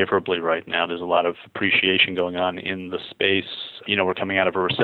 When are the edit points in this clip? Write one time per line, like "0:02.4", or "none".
none